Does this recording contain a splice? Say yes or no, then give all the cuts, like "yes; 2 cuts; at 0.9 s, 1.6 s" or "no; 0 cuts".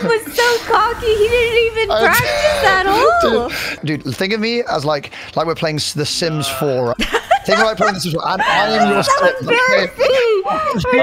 yes; 1 cut; at 3.8 s